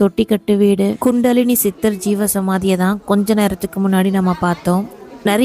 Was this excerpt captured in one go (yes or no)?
no